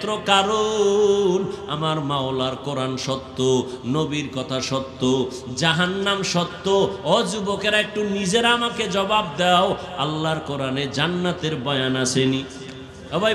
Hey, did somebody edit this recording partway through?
no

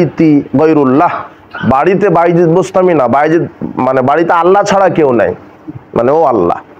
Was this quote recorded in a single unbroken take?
yes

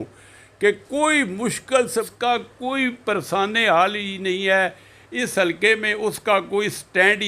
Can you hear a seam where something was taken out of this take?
yes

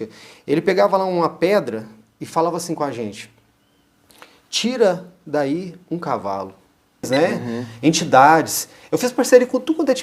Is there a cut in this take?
yes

